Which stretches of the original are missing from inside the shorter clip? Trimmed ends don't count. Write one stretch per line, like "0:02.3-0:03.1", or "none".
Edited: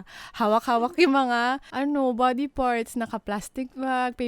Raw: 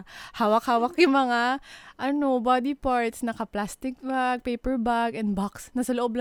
0:01.7-0:01.9